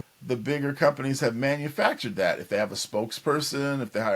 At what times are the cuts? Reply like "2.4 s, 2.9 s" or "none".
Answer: none